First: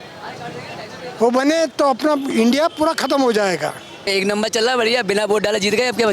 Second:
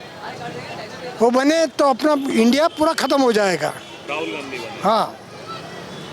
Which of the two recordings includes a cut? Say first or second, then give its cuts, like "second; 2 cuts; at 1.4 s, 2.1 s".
first; 1 cut; at 4.1 s